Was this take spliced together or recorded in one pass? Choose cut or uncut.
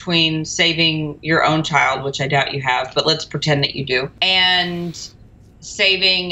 cut